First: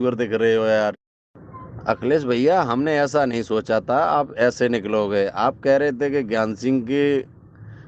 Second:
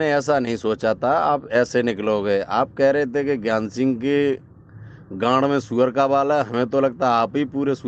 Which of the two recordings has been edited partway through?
first; 1 cut; at 1.0 s

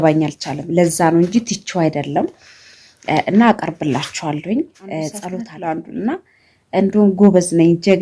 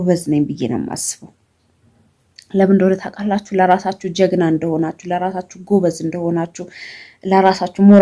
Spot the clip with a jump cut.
first; 1 cut; at 5.4 s

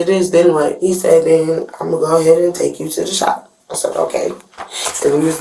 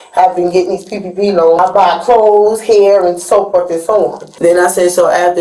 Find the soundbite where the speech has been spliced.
second; 2 cuts; at 1.6 s, 4.2 s

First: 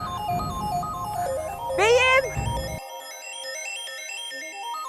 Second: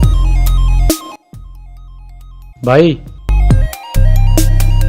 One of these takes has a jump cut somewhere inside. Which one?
second; 1 cut; at 1.0 s

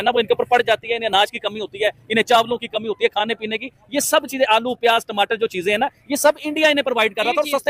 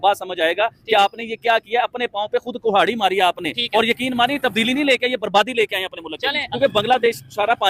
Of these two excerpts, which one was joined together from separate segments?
second; 1 cut; at 6.5 s

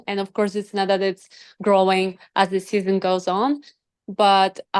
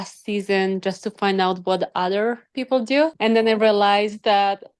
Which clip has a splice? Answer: second; 1 cut; at 3.2 s

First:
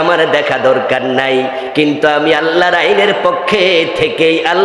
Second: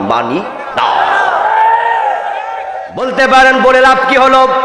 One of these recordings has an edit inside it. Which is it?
second; 1 cut; at 3.2 s

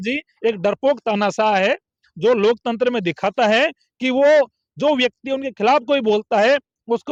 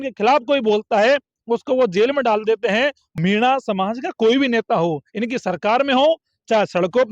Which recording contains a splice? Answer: second; 1 cut; at 3.1 s

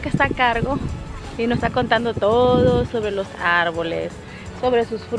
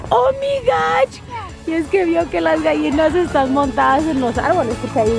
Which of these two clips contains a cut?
second; 1 cut; at 1.2 s

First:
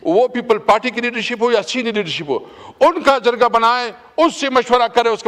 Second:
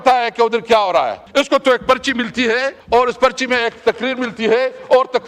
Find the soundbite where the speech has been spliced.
second; 2 cuts; at 1.2 s, 2.8 s

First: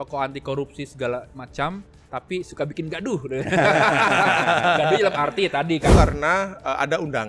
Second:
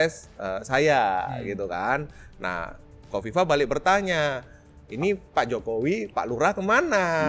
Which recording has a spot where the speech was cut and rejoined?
first; 1 cut; at 5.9 s

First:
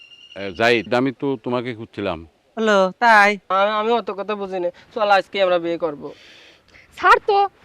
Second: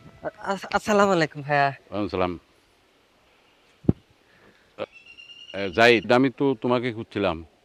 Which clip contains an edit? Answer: first; 1 cut; at 3.5 s

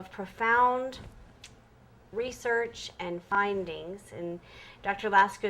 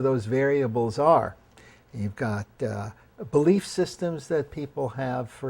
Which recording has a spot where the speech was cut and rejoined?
second; 1 cut; at 2.3 s

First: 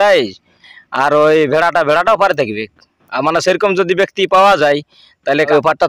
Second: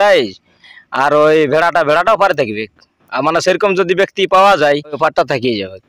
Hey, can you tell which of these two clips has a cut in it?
second; 1 cut; at 5.0 s

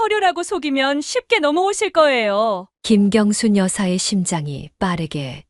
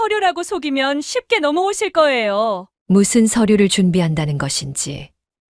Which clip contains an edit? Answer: second; 1 cut; at 2.7 s

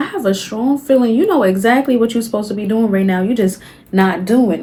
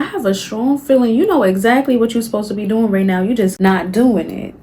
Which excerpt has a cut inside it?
second; 1 cut; at 3.5 s

